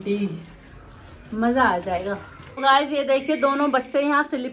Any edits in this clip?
yes; 1 cut; at 2.6 s

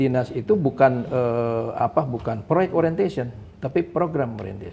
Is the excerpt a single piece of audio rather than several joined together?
yes; 0 cuts

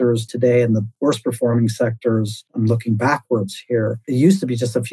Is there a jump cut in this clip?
yes; 3 cuts; at 0.9 s, 2.4 s, 4.0 s

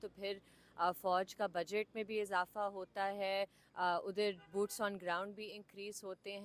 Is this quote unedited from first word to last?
yes; 0 cuts

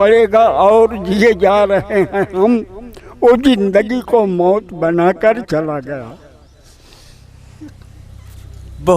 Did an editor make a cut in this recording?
no; 0 cuts

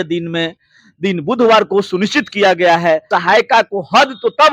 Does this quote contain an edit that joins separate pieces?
yes; 1 cut; at 3.1 s

